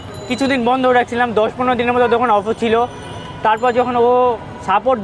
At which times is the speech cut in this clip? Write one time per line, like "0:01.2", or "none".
none